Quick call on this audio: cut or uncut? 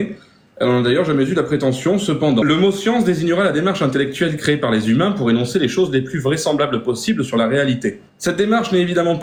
uncut